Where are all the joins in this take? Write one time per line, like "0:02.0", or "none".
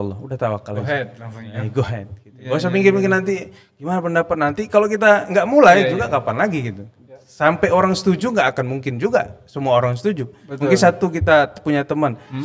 none